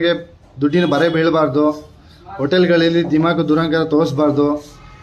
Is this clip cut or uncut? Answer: uncut